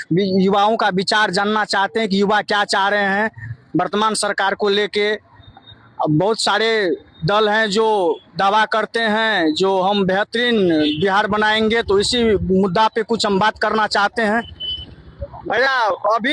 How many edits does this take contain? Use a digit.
1